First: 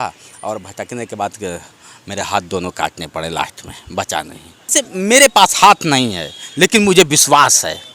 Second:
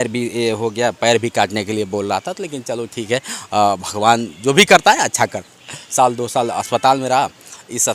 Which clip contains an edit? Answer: first; 1 cut; at 4.7 s

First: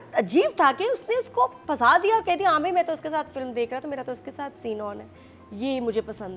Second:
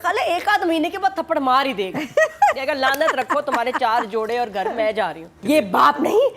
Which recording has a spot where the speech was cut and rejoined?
second; 1 cut; at 5.4 s

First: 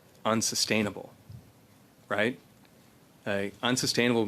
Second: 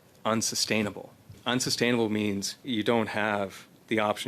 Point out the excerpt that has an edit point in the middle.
second; 2 cuts; at 1.4 s, 2.6 s

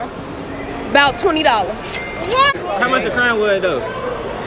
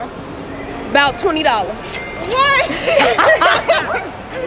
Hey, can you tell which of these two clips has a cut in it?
first; 1 cut; at 2.5 s

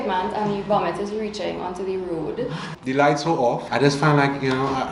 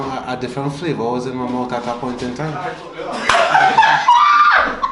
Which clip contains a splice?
first; 2 cuts; at 2.7 s, 3.6 s

